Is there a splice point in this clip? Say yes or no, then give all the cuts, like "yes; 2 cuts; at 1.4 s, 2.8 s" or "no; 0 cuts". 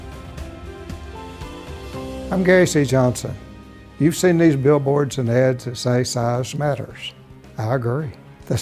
yes; 1 cut; at 2.3 s